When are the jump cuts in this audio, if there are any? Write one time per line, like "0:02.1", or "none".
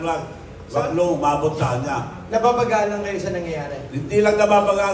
none